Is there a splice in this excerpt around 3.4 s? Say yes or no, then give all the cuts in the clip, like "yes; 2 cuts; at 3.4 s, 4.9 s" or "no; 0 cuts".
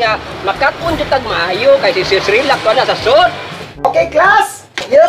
yes; 1 cut; at 3.4 s